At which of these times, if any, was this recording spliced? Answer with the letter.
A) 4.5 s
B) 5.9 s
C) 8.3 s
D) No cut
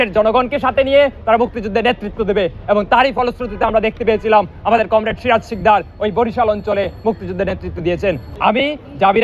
C